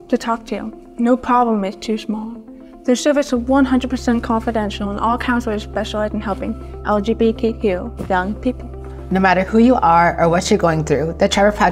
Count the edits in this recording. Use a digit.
0